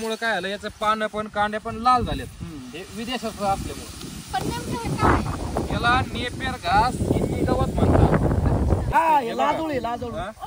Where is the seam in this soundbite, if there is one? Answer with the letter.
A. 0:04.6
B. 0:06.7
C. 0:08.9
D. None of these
C